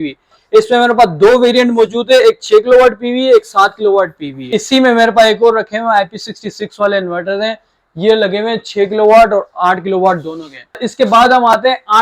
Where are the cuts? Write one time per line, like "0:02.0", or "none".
0:04.5
0:10.8